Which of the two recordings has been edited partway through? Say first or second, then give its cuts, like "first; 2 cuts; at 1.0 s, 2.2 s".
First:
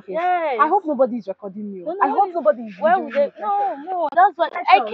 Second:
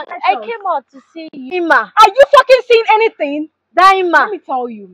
second; 1 cut; at 1.5 s